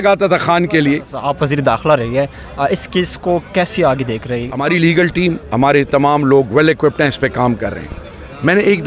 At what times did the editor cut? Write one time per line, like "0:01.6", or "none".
0:01.2
0:04.4